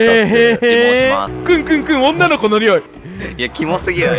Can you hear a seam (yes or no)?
yes